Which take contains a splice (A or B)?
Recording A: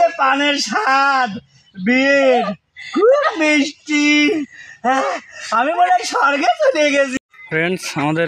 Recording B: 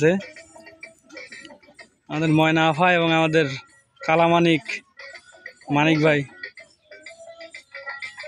A